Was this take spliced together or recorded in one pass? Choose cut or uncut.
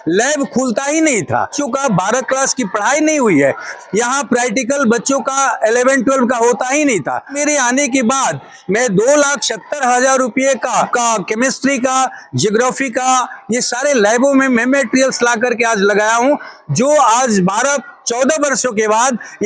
cut